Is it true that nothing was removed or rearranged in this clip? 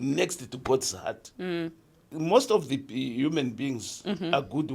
no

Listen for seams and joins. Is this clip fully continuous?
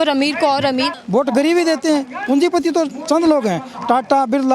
no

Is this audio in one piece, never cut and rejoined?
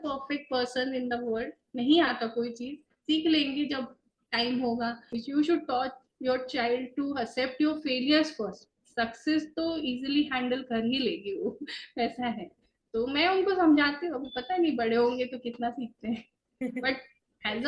no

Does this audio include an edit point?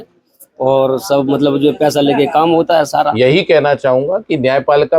yes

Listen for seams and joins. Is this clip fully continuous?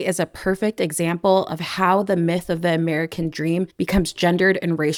yes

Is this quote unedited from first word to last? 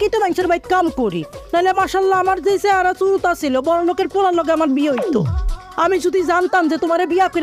yes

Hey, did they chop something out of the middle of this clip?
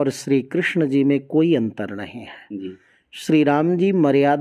no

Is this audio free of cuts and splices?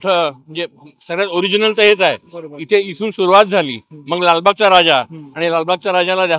yes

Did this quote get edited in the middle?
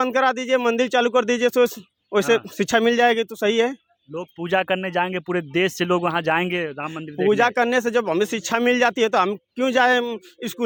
no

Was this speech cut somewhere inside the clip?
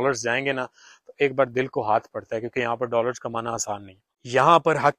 no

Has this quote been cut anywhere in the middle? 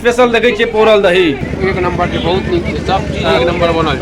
yes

